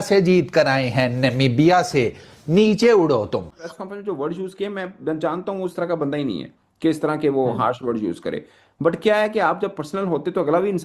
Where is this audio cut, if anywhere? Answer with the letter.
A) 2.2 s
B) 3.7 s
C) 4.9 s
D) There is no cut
B